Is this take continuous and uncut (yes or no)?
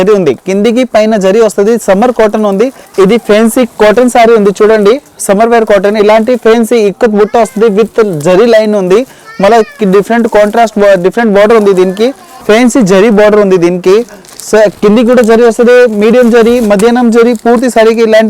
no